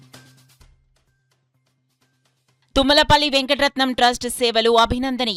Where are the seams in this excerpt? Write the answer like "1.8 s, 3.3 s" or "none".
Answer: none